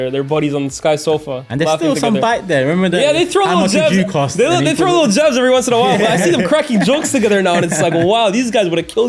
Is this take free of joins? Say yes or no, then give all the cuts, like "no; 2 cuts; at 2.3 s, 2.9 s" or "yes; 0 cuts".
yes; 0 cuts